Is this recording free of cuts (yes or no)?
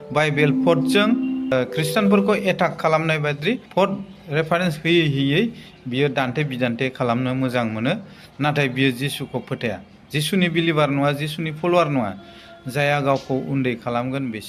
no